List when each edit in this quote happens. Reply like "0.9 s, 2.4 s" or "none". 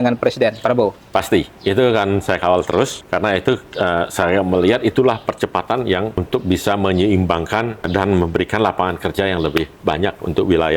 3.0 s, 6.2 s, 7.9 s, 9.7 s